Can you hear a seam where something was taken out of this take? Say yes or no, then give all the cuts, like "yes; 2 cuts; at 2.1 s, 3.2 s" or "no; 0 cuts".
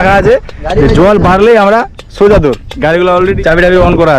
yes; 1 cut; at 2.7 s